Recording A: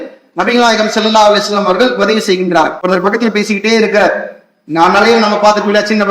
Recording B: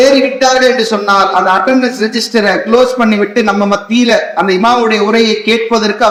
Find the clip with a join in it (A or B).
A